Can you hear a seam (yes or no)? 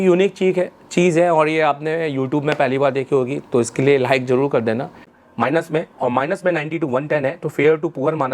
yes